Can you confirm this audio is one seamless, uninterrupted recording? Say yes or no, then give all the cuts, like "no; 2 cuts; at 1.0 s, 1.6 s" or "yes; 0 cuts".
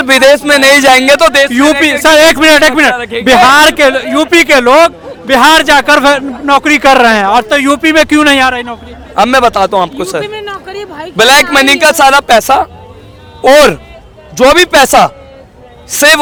yes; 0 cuts